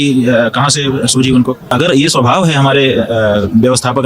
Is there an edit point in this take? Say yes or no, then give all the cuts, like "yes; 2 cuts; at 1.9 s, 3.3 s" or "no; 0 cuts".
yes; 1 cut; at 1.6 s